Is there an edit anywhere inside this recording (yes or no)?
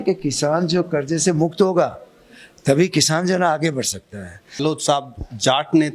yes